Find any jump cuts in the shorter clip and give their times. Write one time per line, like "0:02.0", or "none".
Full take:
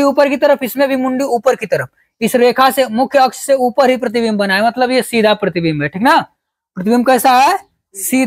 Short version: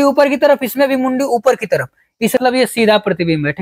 0:02.4